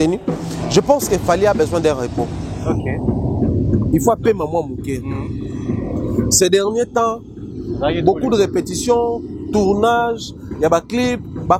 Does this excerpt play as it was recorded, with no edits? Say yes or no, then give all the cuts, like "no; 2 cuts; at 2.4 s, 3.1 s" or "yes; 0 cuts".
yes; 0 cuts